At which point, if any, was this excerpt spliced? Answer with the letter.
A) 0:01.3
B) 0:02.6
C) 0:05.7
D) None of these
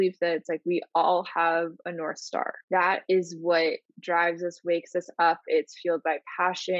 B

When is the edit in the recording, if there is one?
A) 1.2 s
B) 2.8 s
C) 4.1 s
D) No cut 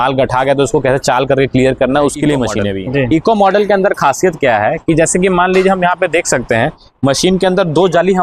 B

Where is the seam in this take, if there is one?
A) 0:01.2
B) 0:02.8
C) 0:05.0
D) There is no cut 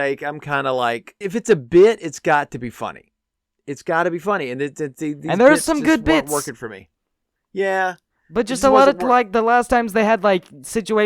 A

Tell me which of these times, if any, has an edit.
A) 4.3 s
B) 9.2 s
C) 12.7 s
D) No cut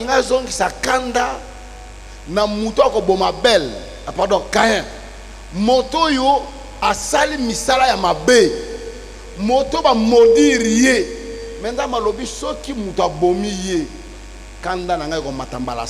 D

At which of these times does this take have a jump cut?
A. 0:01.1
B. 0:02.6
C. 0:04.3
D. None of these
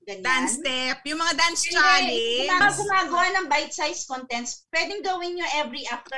B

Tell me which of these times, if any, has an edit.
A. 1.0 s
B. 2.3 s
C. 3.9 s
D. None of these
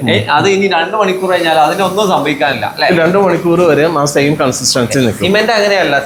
D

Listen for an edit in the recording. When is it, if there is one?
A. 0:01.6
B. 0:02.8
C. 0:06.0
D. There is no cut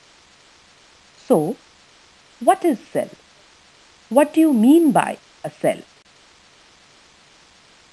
C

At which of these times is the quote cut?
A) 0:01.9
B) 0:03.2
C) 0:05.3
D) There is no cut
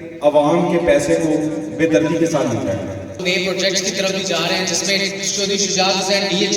B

